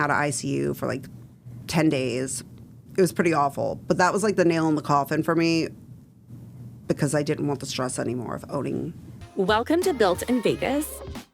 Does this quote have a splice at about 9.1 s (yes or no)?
yes